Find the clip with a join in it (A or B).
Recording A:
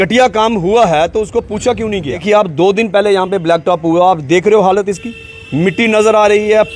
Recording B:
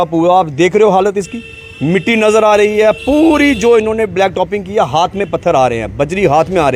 A